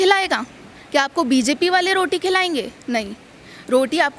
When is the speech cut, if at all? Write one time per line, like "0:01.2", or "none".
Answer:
none